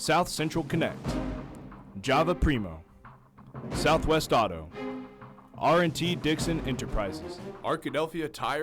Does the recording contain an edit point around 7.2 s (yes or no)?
yes